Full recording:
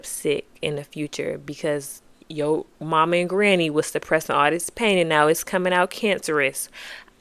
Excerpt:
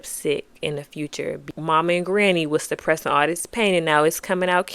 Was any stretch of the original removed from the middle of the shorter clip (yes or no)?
yes